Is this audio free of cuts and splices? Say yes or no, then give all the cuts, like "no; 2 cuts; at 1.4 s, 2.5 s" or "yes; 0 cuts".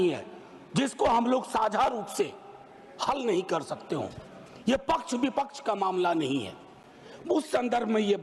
yes; 0 cuts